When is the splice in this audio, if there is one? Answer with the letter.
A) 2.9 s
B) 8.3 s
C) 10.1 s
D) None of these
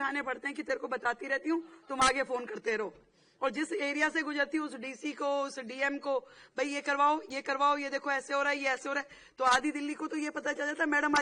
D